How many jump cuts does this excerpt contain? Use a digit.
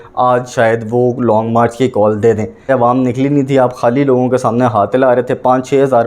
1